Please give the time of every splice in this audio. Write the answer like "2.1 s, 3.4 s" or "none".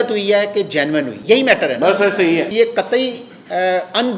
1.1 s, 2.5 s

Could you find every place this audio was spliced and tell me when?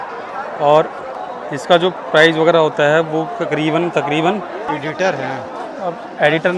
1.2 s, 4.6 s

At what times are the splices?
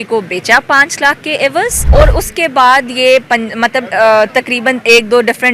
1.8 s

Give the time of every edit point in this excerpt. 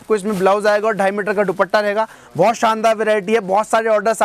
none

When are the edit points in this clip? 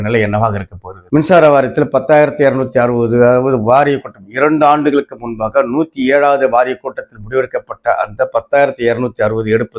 1.0 s

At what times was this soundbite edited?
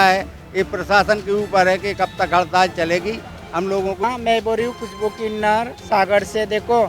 4.0 s

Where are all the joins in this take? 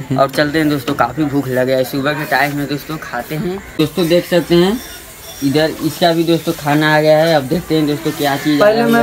3.8 s

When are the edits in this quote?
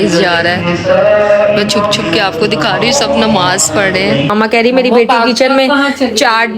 4.3 s

